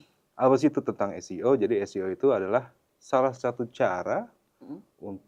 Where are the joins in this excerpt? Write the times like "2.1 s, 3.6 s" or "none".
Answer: none